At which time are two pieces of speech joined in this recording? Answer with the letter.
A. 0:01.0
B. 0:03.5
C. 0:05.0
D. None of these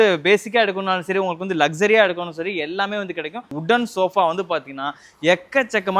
B